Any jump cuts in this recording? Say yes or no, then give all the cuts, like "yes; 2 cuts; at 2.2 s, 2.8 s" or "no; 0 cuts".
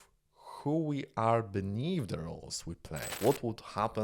yes; 1 cut; at 3.1 s